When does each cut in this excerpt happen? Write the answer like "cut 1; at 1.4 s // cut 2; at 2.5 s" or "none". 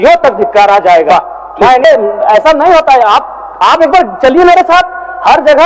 cut 1; at 1.8 s